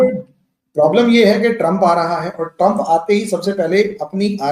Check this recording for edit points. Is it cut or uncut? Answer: uncut